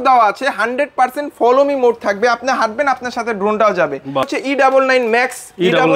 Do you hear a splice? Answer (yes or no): yes